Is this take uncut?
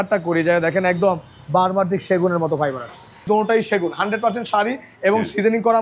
no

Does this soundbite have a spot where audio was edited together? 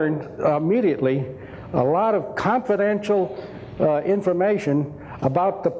yes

